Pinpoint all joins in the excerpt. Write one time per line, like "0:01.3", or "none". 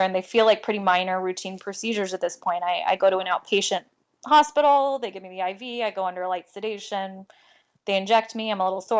none